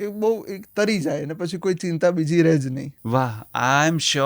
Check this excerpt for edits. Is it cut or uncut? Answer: cut